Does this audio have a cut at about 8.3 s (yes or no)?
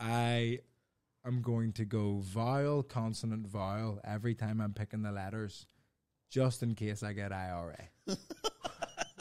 no